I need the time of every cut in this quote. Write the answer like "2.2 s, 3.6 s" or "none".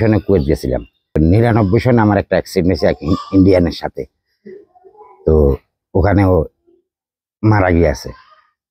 1.2 s

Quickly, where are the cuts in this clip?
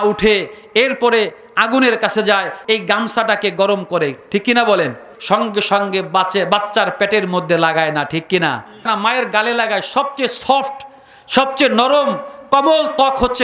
2.5 s, 5.1 s, 8.9 s

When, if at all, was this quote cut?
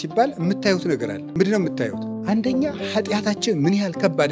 1.2 s, 2.1 s

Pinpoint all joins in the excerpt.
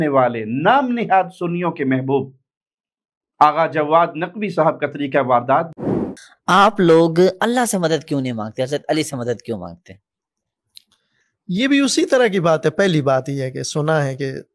5.8 s

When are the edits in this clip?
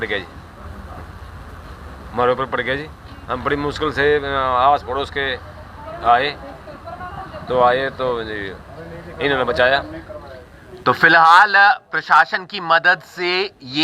10.7 s

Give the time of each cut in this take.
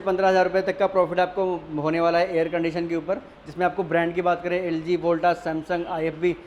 none

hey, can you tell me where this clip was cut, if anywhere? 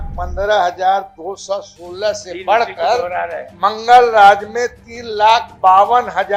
none

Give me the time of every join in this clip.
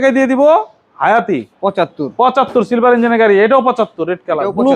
1.5 s

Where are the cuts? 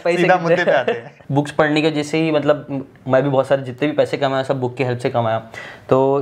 1.2 s

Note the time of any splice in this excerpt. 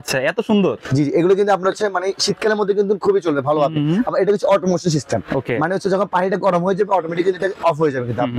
none

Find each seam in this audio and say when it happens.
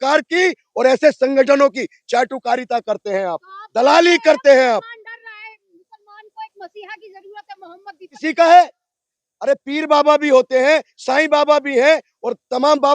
8.2 s

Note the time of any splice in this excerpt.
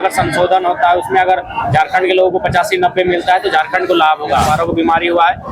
4.5 s

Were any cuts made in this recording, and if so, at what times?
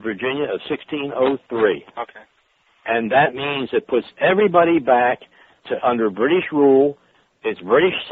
5.9 s

